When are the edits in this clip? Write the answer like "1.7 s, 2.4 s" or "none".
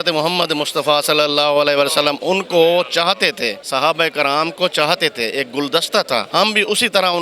3.6 s, 6.3 s

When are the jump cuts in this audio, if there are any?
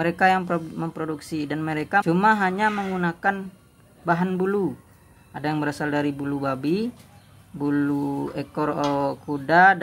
2.0 s

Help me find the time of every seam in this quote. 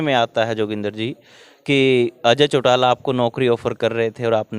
none

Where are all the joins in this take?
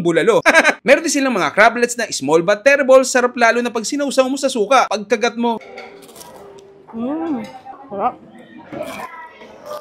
none

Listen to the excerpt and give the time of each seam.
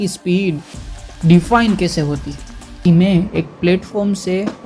2.7 s

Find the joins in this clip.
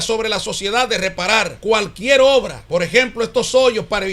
1.5 s, 2.6 s

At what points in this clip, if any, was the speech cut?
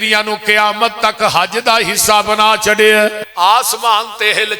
3.2 s

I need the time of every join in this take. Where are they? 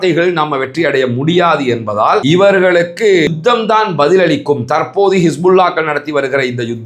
2.2 s

